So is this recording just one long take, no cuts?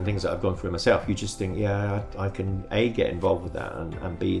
yes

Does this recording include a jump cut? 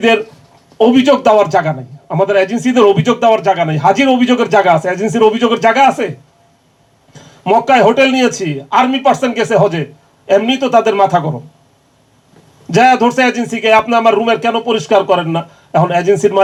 no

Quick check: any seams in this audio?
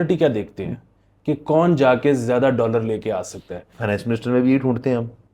no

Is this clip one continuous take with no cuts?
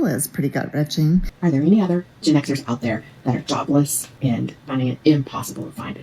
no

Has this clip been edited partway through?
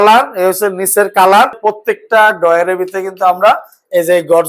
yes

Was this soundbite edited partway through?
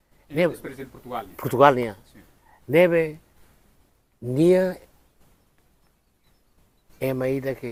no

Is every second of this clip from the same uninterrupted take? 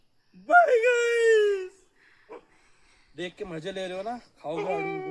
yes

